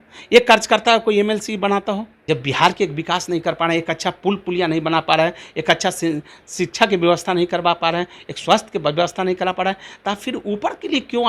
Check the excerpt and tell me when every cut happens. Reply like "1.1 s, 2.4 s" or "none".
2.1 s